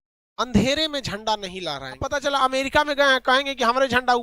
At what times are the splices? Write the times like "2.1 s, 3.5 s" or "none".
2.0 s